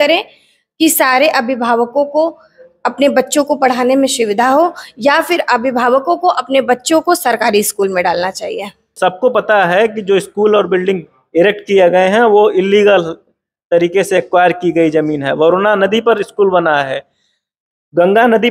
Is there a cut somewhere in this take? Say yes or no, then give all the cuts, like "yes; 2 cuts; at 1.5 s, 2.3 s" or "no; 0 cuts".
yes; 1 cut; at 8.9 s